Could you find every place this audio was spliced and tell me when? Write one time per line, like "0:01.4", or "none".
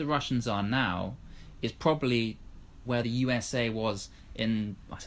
0:03.0